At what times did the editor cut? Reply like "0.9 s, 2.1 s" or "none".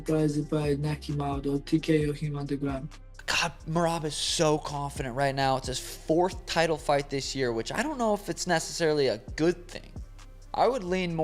2.9 s